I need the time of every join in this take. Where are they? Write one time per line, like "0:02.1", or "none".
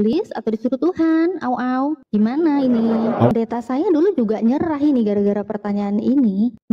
0:03.3